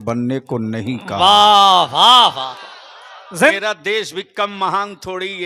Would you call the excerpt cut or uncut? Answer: cut